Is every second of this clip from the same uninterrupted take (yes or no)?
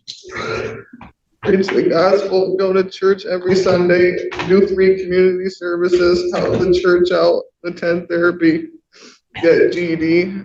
no